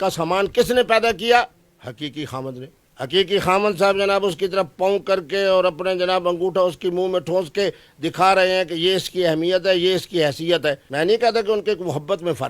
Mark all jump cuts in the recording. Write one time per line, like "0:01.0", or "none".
none